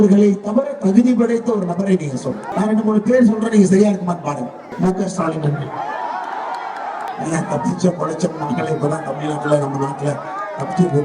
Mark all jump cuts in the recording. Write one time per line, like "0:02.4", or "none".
0:02.5
0:04.6
0:07.1